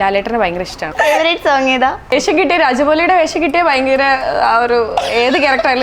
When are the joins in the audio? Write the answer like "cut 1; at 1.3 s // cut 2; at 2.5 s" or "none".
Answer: cut 1; at 0.9 s // cut 2; at 2.1 s